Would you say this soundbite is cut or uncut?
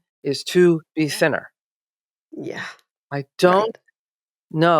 uncut